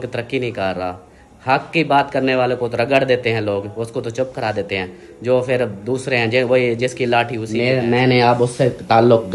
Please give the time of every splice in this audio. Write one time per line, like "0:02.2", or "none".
0:07.5